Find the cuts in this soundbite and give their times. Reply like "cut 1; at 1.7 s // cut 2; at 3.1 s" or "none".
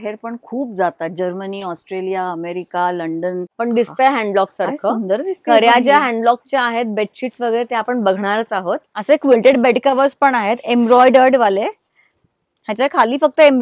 cut 1; at 3.5 s // cut 2; at 8.9 s